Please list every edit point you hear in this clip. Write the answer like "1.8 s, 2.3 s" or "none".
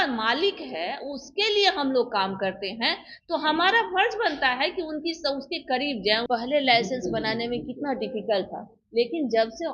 6.3 s